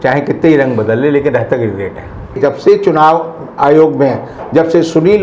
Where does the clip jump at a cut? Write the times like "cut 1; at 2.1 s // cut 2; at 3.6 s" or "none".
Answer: cut 1; at 2.4 s